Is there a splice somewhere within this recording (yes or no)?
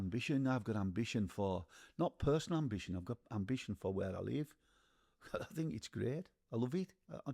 no